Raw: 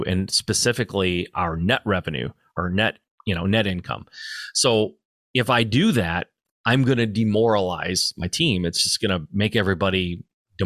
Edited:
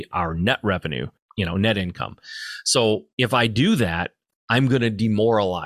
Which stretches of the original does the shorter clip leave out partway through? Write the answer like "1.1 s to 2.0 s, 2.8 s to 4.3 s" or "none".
2.4 s to 3.1 s, 5.0 s to 5.2 s